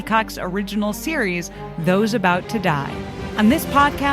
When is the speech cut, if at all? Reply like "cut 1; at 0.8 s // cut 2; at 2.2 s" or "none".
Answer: cut 1; at 3.2 s